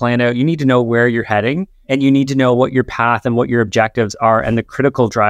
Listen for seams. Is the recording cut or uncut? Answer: cut